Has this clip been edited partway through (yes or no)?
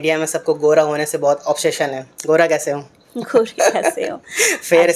no